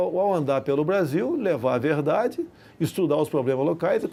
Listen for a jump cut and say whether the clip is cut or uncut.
uncut